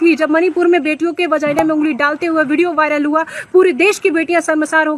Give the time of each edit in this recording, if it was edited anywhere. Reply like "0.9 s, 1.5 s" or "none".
none